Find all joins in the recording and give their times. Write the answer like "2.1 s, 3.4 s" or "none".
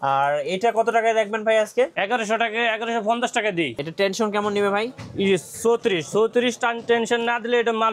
2.0 s, 3.8 s